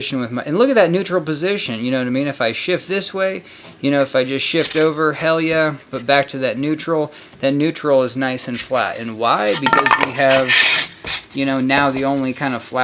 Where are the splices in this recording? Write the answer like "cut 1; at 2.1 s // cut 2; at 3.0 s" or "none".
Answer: none